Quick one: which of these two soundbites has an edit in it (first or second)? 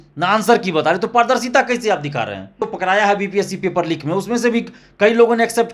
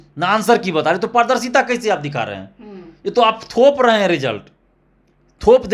first